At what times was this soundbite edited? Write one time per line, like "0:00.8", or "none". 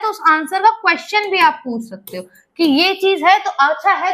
none